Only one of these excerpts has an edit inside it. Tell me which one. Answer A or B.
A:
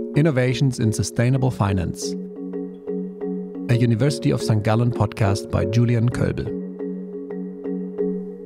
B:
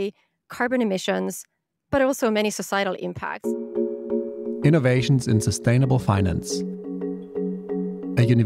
B